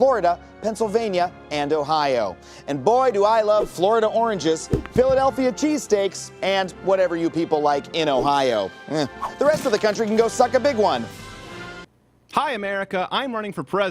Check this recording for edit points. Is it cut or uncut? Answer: cut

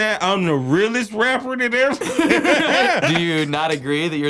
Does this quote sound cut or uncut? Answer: cut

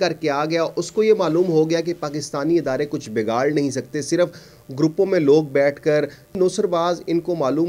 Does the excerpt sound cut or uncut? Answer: cut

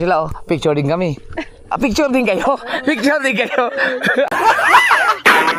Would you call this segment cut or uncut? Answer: uncut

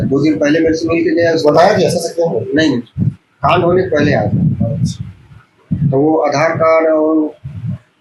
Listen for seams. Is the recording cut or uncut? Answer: uncut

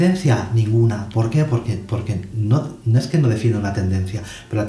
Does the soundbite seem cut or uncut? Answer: uncut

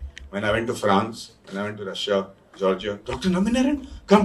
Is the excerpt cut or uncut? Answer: cut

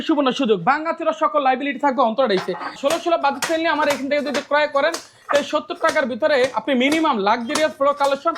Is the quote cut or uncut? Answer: cut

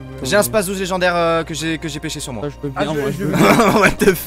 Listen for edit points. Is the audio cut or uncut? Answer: uncut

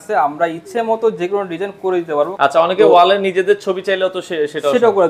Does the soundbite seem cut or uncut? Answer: cut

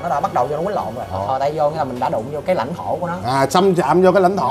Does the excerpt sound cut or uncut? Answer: cut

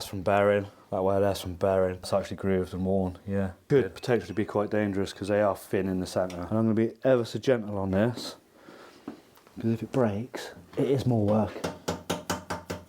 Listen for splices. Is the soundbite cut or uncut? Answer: cut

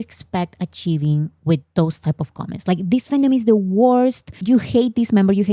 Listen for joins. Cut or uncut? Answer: uncut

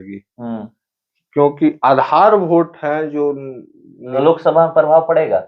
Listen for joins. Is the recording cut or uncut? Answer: cut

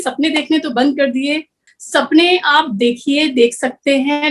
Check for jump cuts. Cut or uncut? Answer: cut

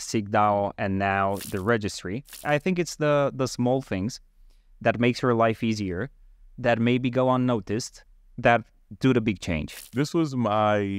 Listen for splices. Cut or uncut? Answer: cut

